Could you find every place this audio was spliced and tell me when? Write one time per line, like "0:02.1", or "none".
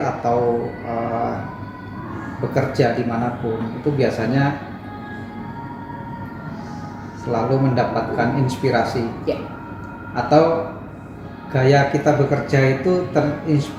none

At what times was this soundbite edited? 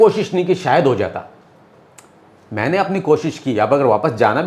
none

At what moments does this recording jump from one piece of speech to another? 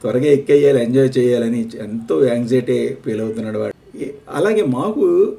0:03.7

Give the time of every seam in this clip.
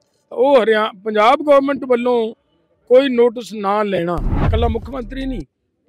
0:04.5

